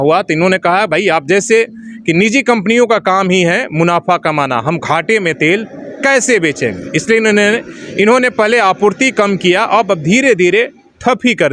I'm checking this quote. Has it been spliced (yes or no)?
no